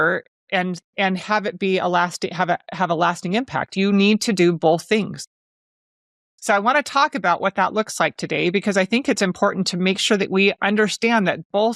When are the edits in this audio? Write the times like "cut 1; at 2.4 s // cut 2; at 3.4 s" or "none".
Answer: none